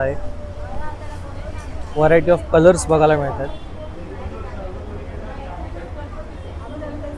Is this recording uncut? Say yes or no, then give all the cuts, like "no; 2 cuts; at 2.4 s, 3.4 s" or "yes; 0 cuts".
yes; 0 cuts